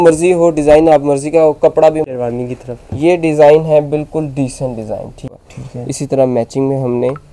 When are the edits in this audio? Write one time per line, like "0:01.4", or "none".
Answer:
0:02.1
0:05.3